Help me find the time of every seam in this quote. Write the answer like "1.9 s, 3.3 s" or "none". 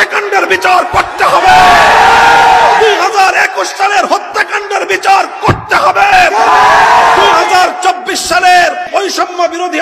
8.8 s